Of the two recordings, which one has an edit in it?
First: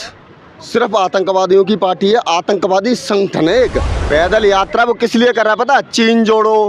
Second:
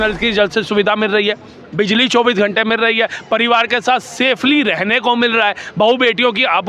first; 1 cut; at 3.9 s

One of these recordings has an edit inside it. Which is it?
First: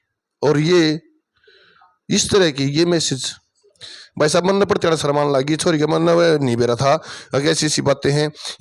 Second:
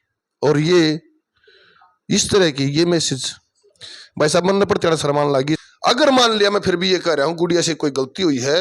second; 1 cut; at 5.6 s

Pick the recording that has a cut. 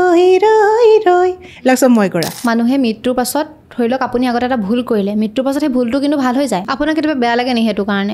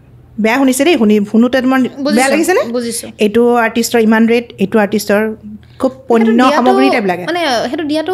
first; 2 cuts; at 2.3 s, 6.7 s

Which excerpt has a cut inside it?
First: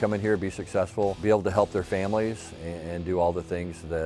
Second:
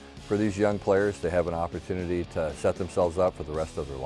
first; 1 cut; at 1.2 s

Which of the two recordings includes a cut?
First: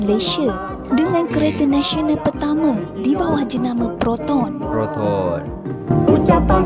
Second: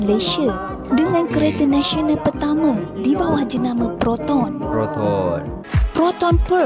second; 1 cut; at 5.6 s

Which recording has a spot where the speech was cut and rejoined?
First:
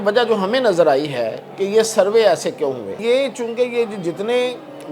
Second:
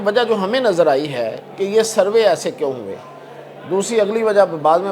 first; 1 cut; at 3.0 s

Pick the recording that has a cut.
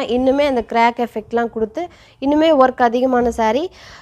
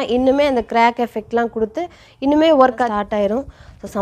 second; 1 cut; at 2.9 s

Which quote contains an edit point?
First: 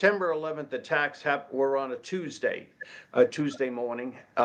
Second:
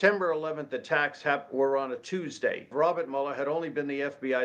second; 1 cut; at 2.7 s

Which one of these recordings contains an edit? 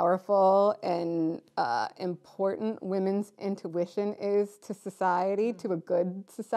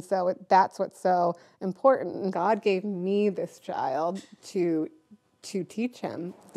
second; 1 cut; at 2.3 s

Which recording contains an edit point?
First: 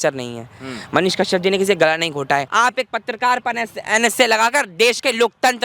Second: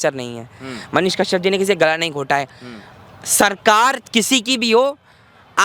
first; 1 cut; at 2.5 s

